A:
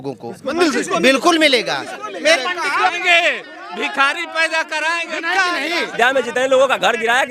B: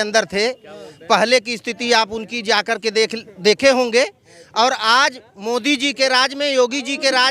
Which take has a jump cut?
A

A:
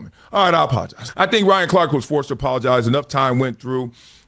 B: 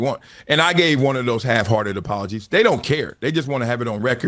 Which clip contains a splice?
A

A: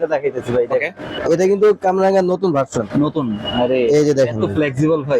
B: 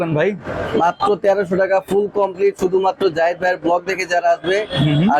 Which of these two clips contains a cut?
A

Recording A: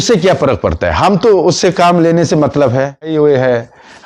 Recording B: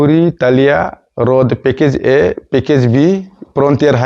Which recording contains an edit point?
A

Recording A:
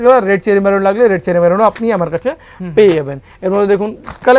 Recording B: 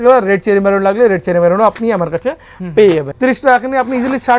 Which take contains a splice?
B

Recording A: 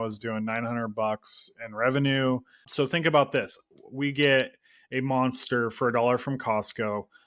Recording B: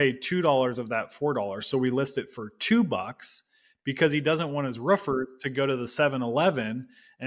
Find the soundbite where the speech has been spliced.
A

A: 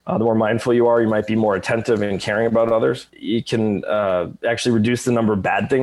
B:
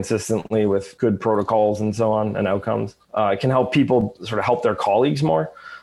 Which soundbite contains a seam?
B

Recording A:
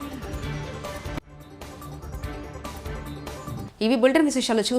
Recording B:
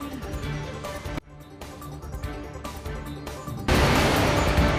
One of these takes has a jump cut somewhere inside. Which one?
B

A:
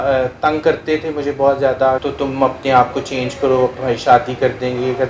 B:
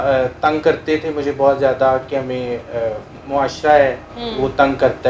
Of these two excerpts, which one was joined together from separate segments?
A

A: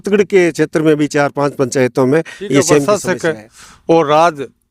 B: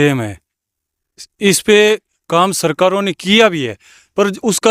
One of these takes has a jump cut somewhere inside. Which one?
A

